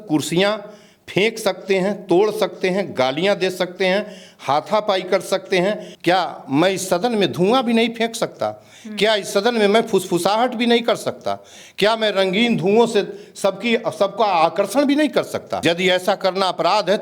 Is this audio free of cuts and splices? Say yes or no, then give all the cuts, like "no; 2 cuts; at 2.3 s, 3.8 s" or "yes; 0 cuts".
no; 2 cuts; at 5.9 s, 15.5 s